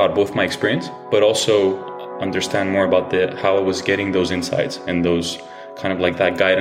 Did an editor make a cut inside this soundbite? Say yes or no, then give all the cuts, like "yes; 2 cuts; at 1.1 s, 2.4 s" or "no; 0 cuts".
no; 0 cuts